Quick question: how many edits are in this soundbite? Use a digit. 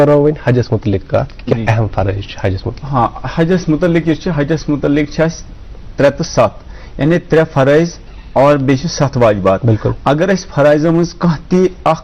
1